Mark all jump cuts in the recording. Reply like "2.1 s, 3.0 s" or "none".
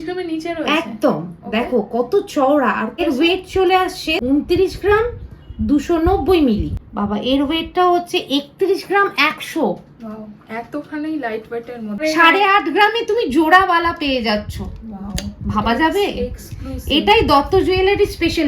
2.9 s, 4.1 s, 6.8 s, 12.0 s